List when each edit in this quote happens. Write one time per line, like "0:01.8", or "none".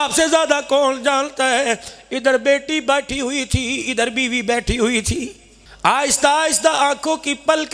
none